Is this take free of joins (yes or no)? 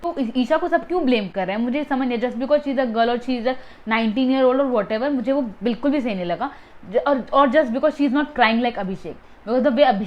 yes